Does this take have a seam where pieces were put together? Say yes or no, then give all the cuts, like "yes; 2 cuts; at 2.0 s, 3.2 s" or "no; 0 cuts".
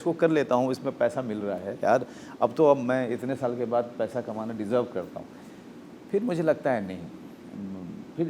no; 0 cuts